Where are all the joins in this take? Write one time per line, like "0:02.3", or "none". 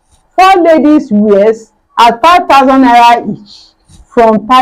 none